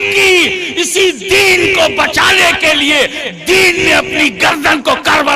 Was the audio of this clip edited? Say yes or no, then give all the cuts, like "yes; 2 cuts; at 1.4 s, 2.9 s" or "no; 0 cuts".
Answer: no; 0 cuts